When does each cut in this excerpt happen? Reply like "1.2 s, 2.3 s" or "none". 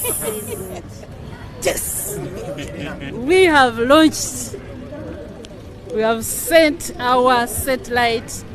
none